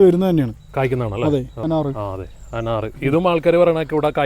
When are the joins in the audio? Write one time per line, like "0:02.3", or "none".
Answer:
0:01.5